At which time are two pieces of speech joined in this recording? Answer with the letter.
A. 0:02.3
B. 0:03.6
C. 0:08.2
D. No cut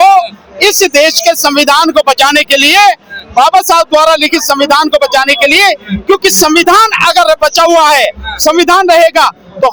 D